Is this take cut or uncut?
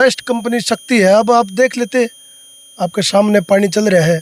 uncut